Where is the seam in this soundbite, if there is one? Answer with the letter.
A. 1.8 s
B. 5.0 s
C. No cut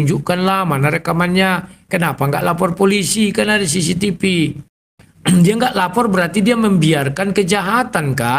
C